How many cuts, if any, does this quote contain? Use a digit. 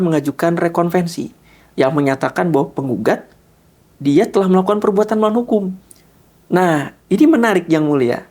0